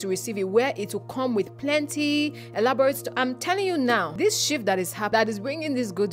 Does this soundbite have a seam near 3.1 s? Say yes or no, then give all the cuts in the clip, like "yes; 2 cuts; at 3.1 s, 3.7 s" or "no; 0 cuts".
yes; 3 cuts; at 3.1 s, 4.1 s, 5.1 s